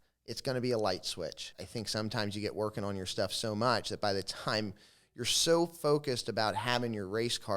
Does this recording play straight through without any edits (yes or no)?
no